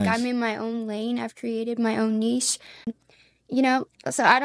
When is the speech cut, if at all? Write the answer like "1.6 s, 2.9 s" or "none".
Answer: 2.9 s